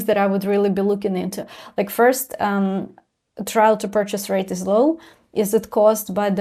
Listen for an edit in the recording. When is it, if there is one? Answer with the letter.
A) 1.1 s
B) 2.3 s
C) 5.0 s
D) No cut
D